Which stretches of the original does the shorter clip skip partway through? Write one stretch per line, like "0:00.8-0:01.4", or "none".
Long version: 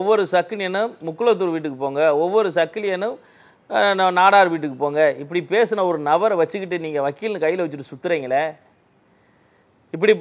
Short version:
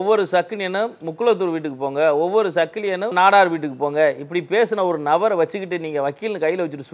0:03.1-0:04.1